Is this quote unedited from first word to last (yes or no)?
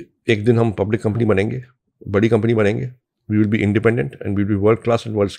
yes